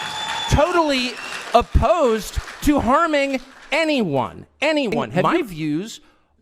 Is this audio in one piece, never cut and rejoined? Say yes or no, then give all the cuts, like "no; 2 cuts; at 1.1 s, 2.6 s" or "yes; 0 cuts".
no; 1 cut; at 5.3 s